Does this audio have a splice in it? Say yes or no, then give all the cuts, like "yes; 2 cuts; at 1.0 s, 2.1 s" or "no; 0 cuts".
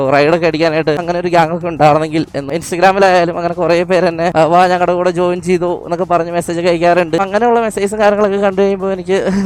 no; 0 cuts